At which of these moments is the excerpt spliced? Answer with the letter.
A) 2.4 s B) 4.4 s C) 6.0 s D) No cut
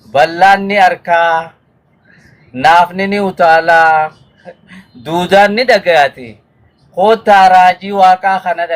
D